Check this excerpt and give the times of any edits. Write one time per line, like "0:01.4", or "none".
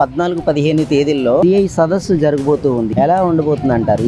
0:02.9